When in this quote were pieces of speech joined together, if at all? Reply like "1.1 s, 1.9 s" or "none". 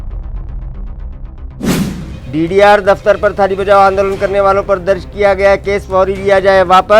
1.7 s